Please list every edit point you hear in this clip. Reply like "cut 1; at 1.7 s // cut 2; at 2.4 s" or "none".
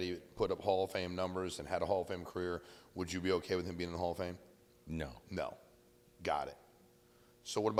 none